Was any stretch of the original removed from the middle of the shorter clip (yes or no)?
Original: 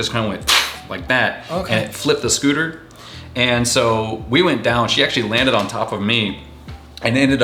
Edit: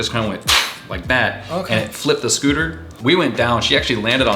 yes